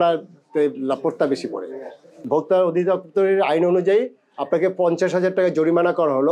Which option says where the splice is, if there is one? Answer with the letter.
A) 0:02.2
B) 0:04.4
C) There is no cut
A